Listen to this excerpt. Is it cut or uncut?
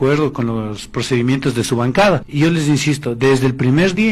cut